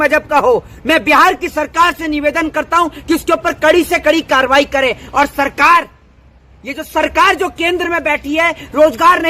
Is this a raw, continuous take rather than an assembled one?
yes; 0 cuts

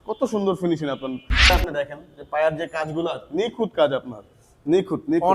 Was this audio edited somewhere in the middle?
yes; 1 cut; at 1.5 s

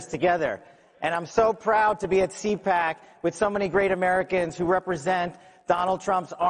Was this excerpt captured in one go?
no; 1 cut; at 2.6 s

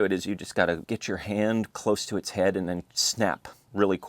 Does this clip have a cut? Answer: yes; 1 cut; at 0.9 s

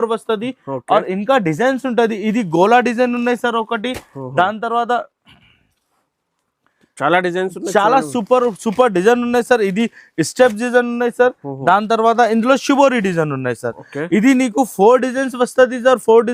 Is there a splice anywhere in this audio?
no; 0 cuts

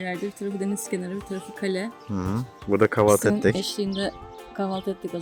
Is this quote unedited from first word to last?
yes; 0 cuts

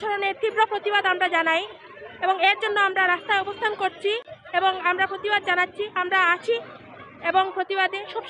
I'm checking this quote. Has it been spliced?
no; 0 cuts

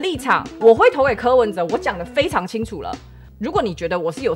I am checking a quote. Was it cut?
no; 0 cuts

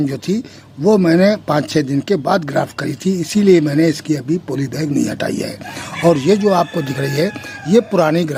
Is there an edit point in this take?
no; 0 cuts

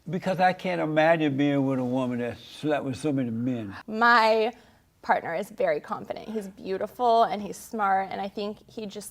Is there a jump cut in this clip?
yes; 1 cut; at 3.8 s

